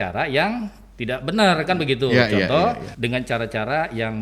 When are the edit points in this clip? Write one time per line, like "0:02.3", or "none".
0:02.9